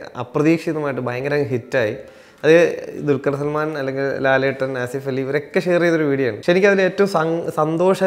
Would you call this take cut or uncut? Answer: cut